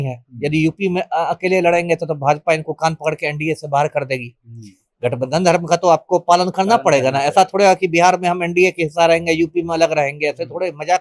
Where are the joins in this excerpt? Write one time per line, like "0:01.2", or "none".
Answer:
none